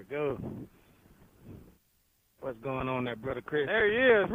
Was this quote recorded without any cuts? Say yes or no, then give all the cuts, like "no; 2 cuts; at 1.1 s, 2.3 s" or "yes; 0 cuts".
yes; 0 cuts